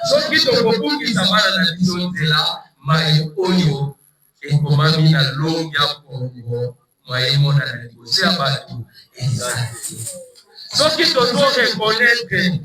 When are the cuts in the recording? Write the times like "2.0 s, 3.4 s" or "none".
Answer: none